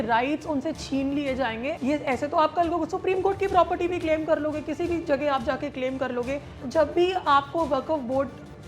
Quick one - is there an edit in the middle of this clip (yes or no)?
yes